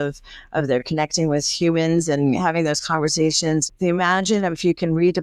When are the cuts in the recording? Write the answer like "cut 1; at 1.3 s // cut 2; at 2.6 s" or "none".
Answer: cut 1; at 3.7 s